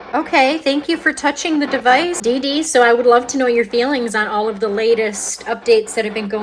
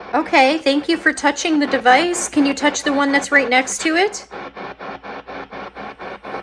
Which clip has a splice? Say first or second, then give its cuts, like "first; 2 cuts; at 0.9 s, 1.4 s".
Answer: first; 1 cut; at 2.2 s